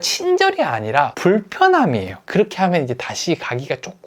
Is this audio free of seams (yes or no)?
no